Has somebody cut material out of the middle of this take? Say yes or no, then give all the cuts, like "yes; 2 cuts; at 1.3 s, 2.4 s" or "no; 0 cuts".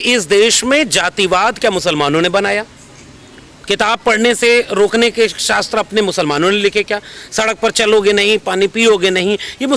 no; 0 cuts